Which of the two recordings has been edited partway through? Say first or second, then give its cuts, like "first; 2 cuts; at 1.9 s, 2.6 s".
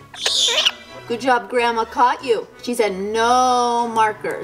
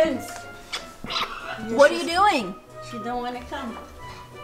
first; 1 cut; at 0.9 s